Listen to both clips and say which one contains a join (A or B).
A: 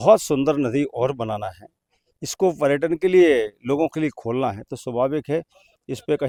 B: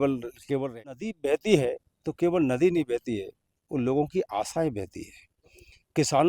B